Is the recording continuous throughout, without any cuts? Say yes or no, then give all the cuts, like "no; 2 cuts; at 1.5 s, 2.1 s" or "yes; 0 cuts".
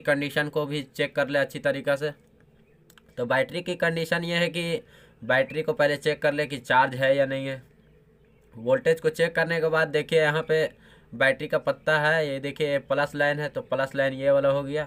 yes; 0 cuts